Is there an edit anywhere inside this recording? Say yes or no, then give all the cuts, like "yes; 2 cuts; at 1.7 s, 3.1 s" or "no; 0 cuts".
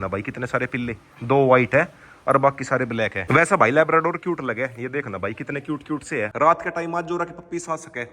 yes; 2 cuts; at 3.2 s, 6.3 s